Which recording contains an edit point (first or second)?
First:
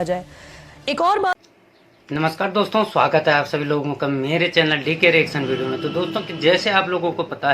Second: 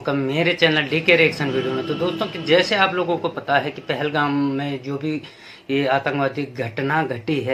first